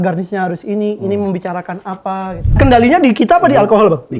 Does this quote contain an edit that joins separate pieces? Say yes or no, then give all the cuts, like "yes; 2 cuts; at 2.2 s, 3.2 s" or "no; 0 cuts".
yes; 1 cut; at 2.5 s